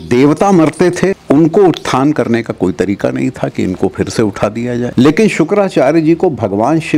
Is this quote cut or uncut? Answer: cut